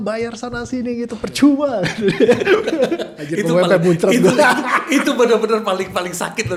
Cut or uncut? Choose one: uncut